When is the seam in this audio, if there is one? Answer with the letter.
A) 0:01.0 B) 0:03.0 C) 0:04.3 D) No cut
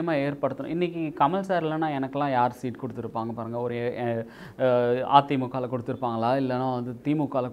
D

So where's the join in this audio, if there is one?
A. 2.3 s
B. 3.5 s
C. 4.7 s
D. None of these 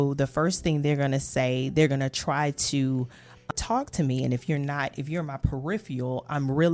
B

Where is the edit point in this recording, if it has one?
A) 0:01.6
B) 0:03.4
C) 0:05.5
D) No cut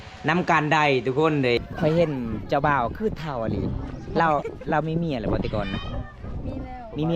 A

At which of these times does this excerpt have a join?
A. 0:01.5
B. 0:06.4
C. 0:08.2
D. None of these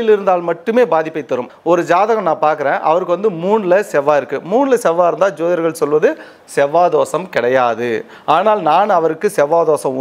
A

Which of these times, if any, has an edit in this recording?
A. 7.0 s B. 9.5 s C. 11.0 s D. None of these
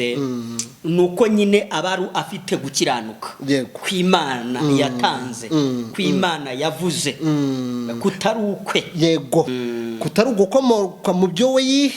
B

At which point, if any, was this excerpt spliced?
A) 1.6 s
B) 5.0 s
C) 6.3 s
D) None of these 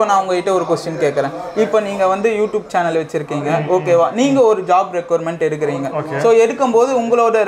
D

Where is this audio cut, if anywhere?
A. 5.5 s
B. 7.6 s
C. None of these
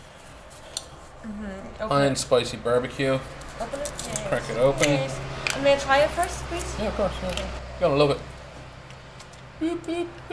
B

